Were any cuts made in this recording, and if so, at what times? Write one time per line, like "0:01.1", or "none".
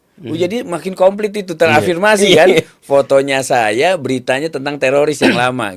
none